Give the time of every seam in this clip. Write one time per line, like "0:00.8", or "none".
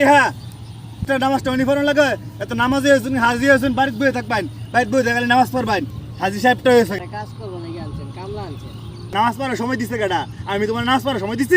0:01.0
0:07.0
0:09.1